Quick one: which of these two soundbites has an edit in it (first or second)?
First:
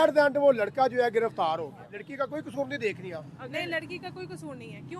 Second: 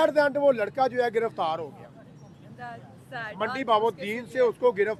first